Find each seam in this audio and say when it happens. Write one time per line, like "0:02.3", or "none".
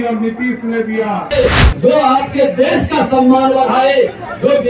0:01.3